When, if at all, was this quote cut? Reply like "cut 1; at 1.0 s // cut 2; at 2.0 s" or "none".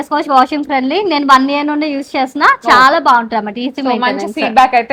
none